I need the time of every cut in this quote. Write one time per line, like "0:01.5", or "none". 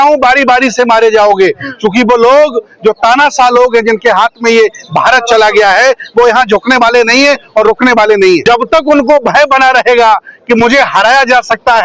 0:08.4